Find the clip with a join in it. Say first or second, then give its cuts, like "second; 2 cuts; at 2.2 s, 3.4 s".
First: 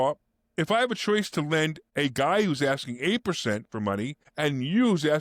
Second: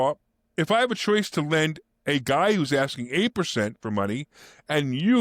first; 2 cuts; at 1.8 s, 4.2 s